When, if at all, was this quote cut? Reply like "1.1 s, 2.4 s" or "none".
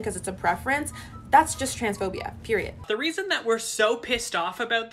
2.8 s